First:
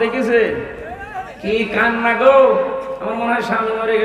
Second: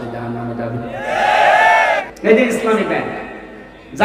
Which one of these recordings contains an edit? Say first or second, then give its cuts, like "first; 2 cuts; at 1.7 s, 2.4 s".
second; 1 cut; at 2.0 s